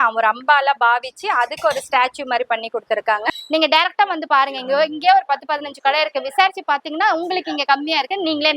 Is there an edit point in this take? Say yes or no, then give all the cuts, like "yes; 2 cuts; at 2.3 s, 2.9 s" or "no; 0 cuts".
yes; 1 cut; at 3.3 s